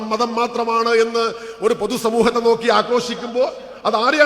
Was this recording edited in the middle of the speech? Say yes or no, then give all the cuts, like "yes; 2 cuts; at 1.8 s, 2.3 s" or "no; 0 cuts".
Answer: no; 0 cuts